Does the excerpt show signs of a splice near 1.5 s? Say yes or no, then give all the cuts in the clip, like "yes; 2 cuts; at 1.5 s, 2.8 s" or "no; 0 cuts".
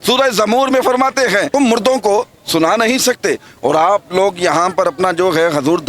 yes; 1 cut; at 1.5 s